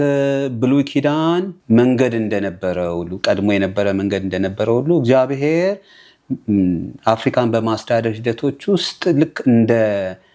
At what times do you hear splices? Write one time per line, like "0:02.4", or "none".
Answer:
0:01.6

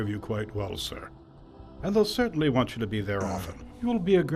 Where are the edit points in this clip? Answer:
none

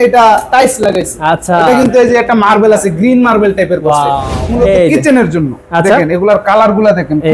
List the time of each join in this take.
0:04.3

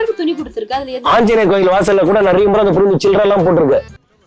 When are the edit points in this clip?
none

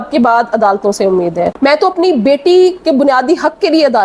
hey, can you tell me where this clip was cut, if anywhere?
0:01.5

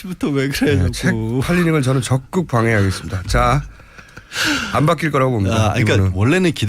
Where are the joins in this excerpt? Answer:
none

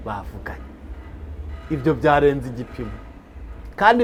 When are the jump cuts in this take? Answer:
none

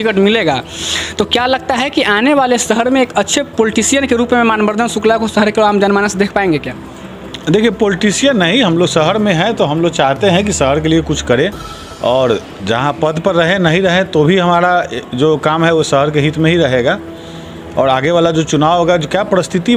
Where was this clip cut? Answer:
none

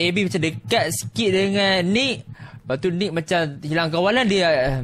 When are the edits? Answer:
none

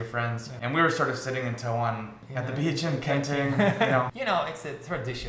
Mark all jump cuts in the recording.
0:04.1

